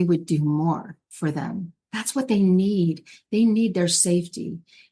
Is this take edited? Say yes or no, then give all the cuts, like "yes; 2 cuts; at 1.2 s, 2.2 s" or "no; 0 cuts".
yes; 1 cut; at 1.5 s